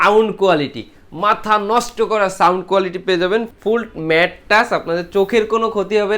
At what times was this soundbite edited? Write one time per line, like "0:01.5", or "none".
0:03.5